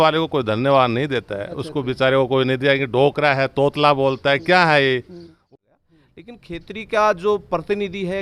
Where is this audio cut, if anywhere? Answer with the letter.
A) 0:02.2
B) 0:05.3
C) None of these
B